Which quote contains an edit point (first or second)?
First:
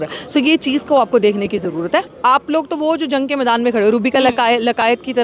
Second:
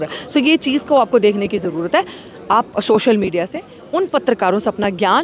first